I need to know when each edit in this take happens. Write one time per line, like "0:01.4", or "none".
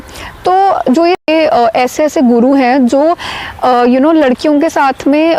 0:01.3